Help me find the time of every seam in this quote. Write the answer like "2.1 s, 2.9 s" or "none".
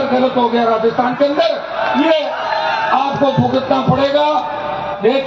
none